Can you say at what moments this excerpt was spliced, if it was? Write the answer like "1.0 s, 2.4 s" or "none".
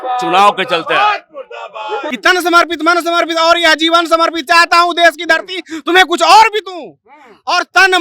2.1 s